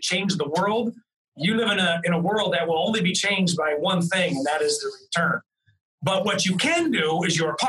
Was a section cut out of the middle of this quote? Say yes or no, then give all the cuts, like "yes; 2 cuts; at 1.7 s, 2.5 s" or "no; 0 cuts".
no; 0 cuts